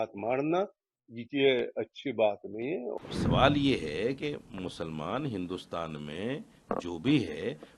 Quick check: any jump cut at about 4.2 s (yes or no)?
no